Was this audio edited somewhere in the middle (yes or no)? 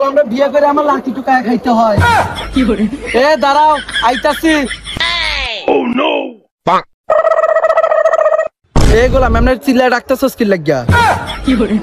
no